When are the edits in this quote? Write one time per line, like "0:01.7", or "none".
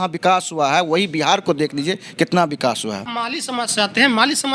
0:03.1